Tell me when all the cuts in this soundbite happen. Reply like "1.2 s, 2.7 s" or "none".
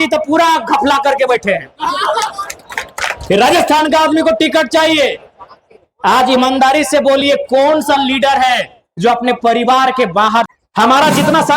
10.5 s